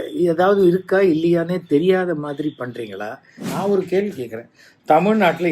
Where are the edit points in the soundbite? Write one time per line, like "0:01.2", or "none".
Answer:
0:03.5